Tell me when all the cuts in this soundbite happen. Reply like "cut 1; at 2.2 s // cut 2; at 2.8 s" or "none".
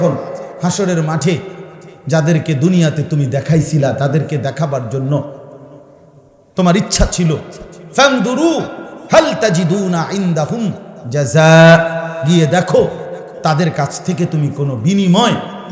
none